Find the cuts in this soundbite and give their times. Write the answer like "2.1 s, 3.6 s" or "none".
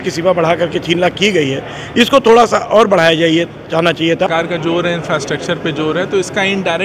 4.3 s